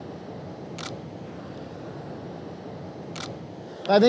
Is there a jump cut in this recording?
no; 0 cuts

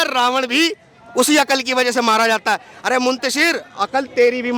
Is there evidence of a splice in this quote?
no; 0 cuts

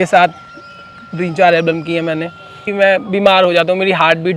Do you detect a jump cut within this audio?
yes; 1 cut; at 2.6 s

